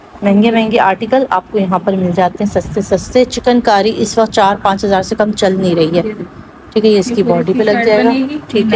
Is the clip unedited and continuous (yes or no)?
yes